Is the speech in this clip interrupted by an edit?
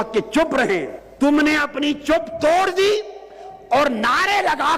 yes; 1 cut; at 1.0 s

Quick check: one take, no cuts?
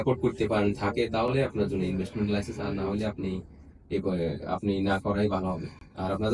yes; 0 cuts

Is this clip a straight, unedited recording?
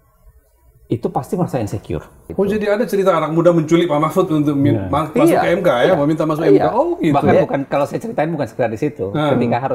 no; 1 cut; at 2.3 s

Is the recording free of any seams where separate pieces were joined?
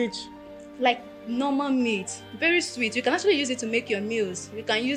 yes; 0 cuts

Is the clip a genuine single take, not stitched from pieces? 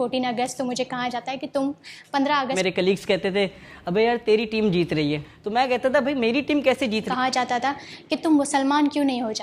no; 2 cuts; at 2.5 s, 7.1 s

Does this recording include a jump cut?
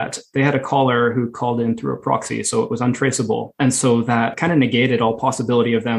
yes; 2 cuts; at 3.5 s, 4.4 s

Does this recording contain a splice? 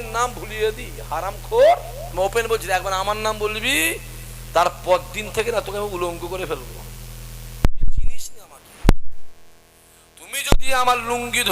yes; 1 cut; at 2.0 s

